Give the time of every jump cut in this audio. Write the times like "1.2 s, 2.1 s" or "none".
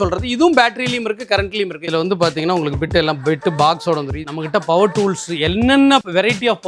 1.8 s, 4.2 s